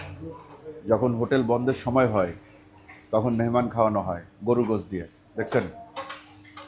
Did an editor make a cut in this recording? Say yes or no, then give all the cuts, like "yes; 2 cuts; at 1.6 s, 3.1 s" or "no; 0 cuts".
no; 0 cuts